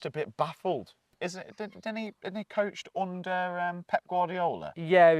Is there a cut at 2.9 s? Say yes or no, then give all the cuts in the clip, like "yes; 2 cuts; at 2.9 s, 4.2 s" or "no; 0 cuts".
no; 1 cut; at 1.1 s